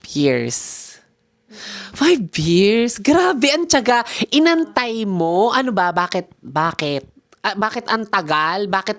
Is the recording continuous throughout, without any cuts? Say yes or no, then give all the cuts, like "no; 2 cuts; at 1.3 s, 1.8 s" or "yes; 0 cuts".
yes; 0 cuts